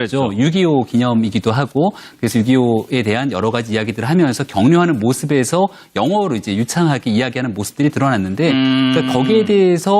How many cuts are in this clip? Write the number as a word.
zero